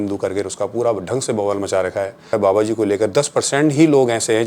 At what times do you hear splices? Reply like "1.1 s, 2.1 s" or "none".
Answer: 2.3 s